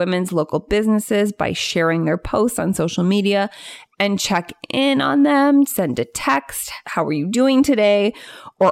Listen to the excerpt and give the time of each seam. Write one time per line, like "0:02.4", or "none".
0:06.8